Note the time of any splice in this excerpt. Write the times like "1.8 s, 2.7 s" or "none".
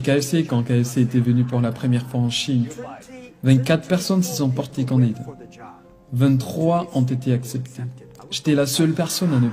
none

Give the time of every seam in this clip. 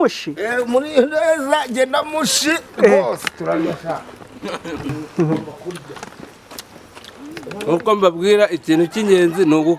5.0 s

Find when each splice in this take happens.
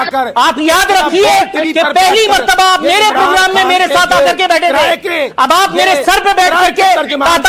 none

